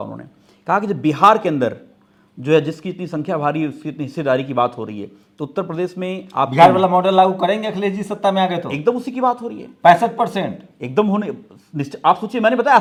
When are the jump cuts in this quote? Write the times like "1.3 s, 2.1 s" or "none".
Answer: none